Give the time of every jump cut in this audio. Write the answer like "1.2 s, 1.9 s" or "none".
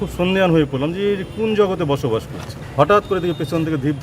2.6 s